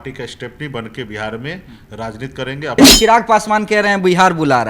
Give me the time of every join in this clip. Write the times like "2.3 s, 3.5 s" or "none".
2.8 s